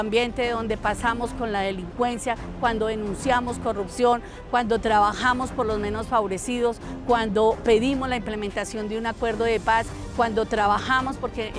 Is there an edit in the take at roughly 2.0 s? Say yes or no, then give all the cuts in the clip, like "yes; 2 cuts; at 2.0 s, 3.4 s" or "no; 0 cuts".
no; 0 cuts